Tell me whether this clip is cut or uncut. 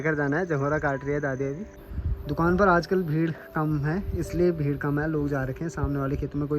cut